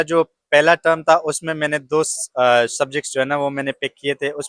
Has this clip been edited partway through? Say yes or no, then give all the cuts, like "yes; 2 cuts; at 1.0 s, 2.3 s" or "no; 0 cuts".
no; 0 cuts